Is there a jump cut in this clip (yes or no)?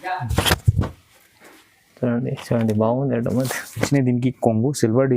yes